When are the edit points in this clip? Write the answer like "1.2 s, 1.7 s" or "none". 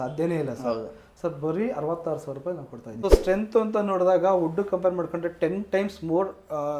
2.9 s